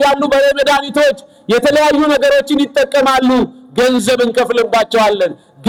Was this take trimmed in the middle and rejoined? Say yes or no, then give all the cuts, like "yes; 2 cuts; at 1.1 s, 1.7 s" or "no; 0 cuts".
no; 0 cuts